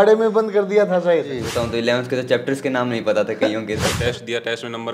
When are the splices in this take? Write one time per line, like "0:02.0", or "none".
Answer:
0:01.5
0:03.9